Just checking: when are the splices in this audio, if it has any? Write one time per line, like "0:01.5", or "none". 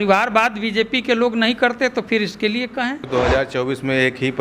0:03.1